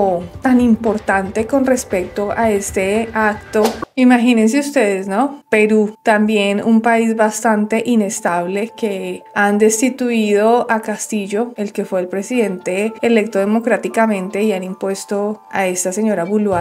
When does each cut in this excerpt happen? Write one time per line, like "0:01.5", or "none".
0:03.9